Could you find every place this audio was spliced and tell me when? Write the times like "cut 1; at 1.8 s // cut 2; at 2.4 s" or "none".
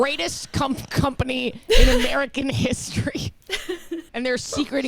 cut 1; at 4.0 s